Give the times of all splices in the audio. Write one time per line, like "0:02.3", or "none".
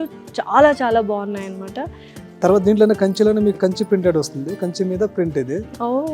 none